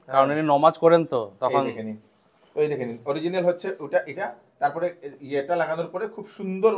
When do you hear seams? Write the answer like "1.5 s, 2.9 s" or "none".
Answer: none